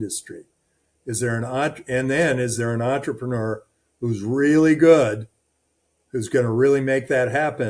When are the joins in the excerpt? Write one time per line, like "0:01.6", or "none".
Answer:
none